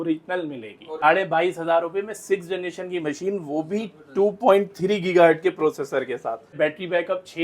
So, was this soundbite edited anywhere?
yes; 2 cuts; at 1.0 s, 6.6 s

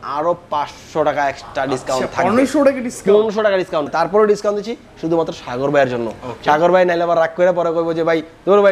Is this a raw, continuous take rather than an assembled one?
no; 1 cut; at 3.9 s

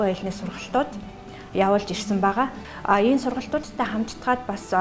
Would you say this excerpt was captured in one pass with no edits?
yes; 0 cuts

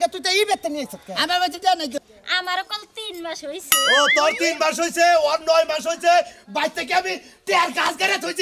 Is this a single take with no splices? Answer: no; 1 cut; at 2.1 s

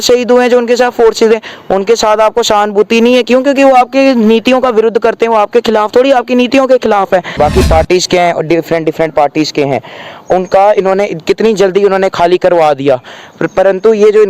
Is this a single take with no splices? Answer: no; 1 cut; at 7.3 s

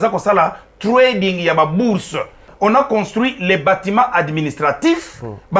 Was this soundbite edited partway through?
yes; 1 cut; at 2.5 s

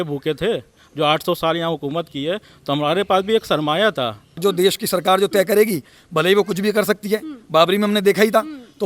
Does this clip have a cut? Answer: yes; 1 cut; at 4.4 s

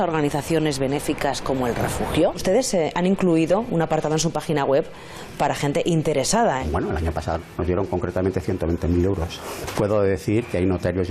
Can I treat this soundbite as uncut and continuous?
no; 3 cuts; at 2.6 s, 6.6 s, 9.4 s

